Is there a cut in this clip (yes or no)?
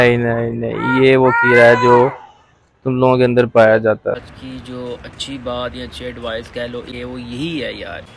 yes